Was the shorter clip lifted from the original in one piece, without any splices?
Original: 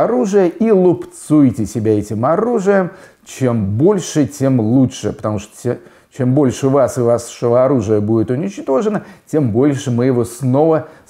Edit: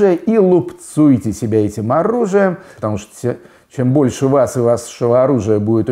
no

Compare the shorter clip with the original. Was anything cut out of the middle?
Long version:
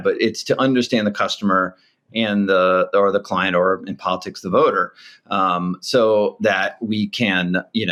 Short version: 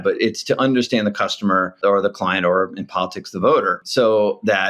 yes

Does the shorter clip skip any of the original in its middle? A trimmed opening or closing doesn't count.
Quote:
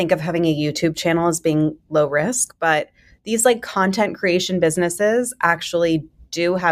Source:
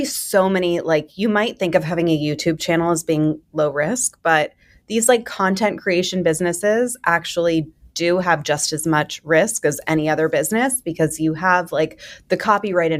no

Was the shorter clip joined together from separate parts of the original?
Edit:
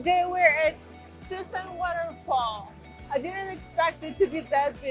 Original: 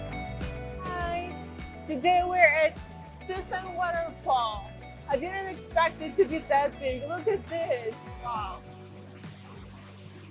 no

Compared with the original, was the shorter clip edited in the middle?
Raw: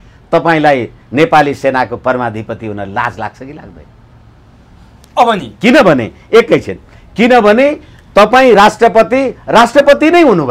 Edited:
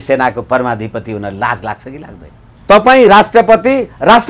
yes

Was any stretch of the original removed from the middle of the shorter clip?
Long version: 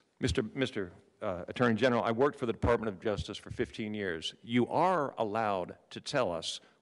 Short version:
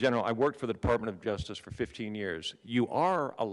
no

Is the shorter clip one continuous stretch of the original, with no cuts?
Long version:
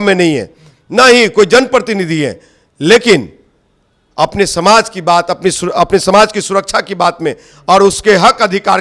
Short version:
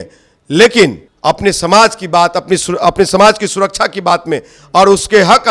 no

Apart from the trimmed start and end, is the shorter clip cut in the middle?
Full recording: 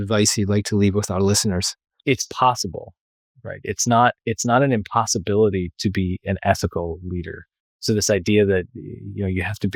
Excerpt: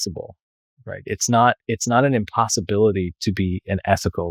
no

